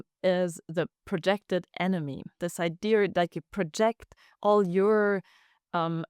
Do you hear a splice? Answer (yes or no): yes